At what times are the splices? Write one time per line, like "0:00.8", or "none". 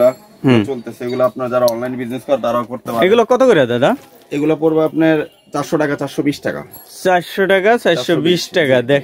none